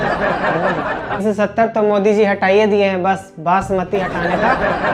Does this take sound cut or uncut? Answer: cut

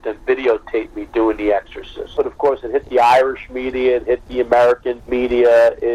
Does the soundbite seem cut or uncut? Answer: cut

